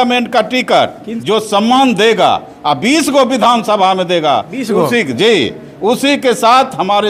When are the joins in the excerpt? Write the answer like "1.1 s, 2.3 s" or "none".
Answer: 1.1 s